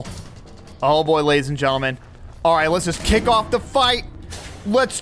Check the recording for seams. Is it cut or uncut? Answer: uncut